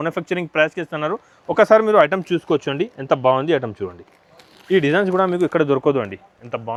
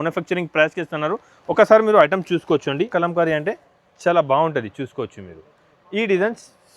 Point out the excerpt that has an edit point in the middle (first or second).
second